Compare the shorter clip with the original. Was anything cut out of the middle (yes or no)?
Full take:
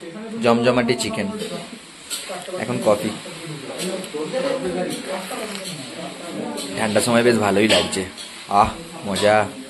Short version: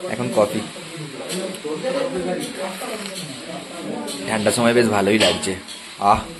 no